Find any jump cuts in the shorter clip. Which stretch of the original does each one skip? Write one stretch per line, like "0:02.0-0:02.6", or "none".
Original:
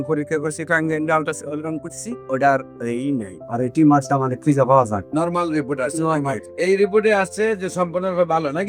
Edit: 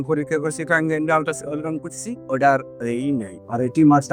none